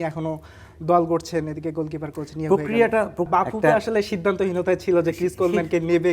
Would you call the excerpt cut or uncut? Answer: cut